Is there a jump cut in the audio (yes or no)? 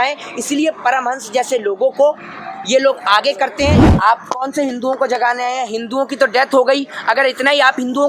yes